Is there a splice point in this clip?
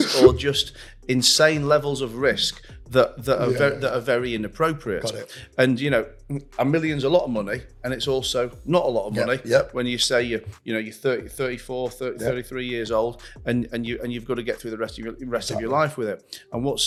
no; 0 cuts

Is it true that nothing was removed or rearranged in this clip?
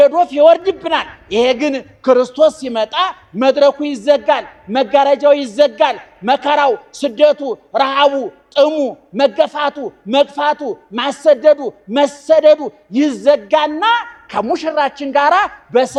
yes; 0 cuts

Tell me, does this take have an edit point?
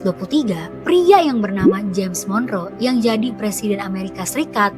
no; 0 cuts

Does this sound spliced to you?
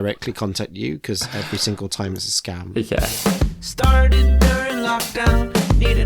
yes; 1 cut; at 3.1 s

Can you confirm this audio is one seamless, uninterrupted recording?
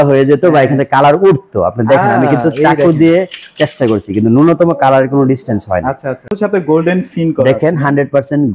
no; 1 cut; at 6.4 s

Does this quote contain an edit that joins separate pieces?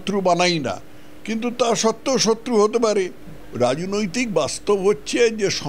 yes; 1 cut; at 3.2 s

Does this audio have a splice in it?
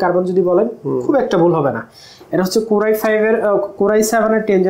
no; 0 cuts

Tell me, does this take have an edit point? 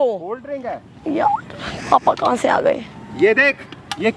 no; 0 cuts

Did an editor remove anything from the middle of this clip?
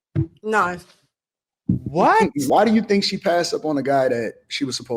yes; 1 cut; at 2.5 s

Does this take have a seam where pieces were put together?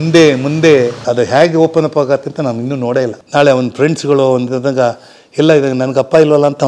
yes; 2 cuts; at 1.0 s, 3.2 s

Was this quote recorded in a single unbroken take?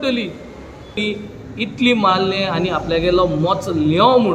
no; 1 cut; at 1.0 s

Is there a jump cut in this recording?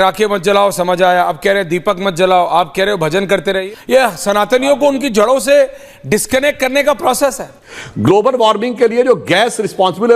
yes; 2 cuts; at 3.6 s, 7.5 s

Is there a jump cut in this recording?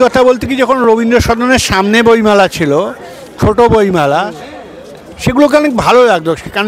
no; 0 cuts

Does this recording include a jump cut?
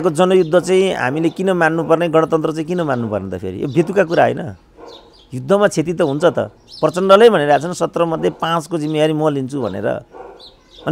no; 0 cuts

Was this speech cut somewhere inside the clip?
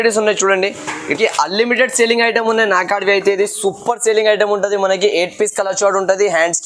yes; 1 cut; at 1.1 s

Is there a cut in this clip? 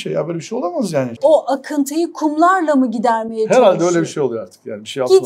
yes; 1 cut; at 1.1 s

